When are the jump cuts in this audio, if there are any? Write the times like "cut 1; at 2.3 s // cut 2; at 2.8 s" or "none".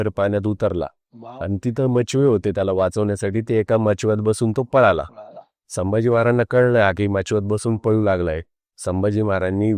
none